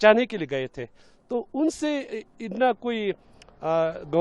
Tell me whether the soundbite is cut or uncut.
uncut